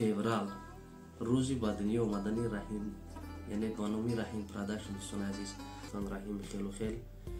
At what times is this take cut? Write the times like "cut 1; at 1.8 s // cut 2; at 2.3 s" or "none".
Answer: cut 1; at 5.9 s